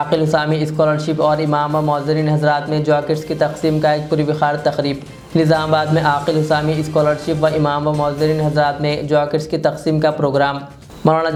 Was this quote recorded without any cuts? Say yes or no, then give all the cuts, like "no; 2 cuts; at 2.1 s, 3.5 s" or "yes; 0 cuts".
yes; 0 cuts